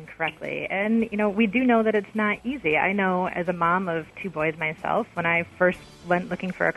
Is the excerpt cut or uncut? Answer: uncut